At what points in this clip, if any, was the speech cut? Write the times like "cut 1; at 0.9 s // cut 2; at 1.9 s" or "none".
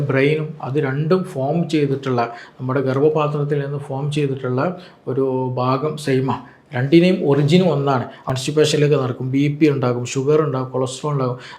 cut 1; at 8.2 s